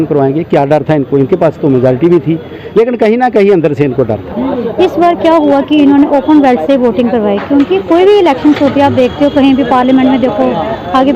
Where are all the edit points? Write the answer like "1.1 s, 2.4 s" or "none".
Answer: 4.3 s